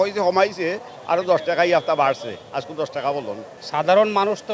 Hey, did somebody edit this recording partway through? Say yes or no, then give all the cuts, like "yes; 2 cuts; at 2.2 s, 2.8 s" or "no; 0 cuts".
yes; 1 cut; at 3.5 s